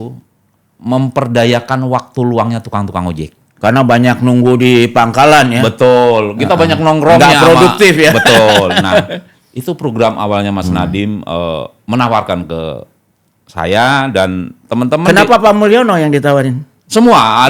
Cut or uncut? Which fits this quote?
uncut